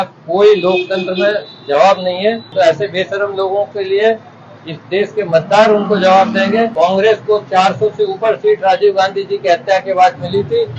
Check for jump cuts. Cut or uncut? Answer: cut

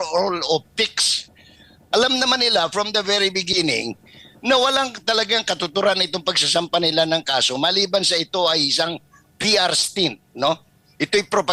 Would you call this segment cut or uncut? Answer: uncut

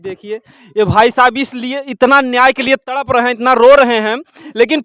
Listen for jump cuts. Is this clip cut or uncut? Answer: uncut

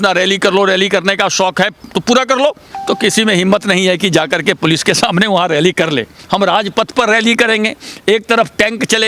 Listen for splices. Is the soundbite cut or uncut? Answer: cut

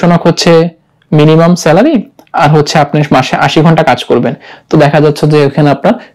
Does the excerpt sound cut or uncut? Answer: uncut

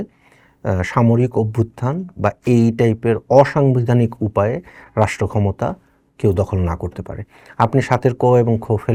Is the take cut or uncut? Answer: uncut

